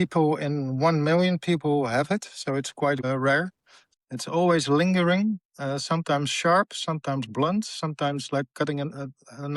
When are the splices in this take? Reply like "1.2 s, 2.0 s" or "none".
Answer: 3.8 s